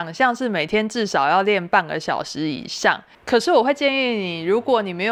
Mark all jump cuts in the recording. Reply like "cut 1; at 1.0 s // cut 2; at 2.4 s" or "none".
none